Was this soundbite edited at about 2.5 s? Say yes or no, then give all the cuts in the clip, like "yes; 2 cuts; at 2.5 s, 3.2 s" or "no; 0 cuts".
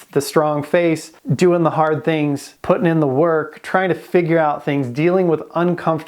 yes; 2 cuts; at 1.2 s, 2.5 s